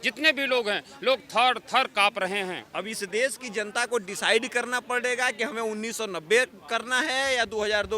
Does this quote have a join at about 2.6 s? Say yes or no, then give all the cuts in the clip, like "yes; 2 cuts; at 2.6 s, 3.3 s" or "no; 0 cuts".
yes; 1 cut; at 2.6 s